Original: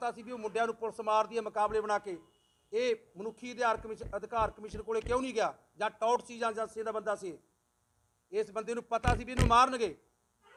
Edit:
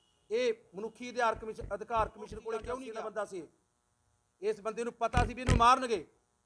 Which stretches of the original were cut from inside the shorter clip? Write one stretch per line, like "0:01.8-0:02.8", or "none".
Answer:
0:05.2-0:06.7